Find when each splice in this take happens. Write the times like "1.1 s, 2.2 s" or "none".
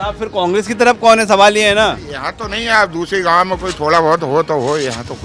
none